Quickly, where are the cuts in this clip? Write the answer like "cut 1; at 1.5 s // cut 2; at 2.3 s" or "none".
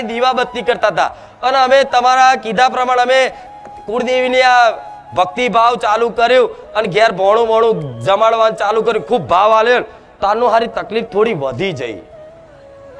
cut 1; at 12.1 s